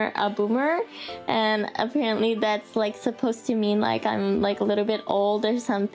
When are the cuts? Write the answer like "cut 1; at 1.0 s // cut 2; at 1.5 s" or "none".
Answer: none